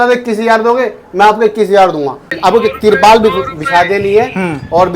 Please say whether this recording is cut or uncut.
cut